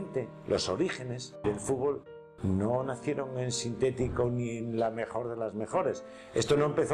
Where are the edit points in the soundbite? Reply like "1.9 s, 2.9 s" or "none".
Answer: 1.4 s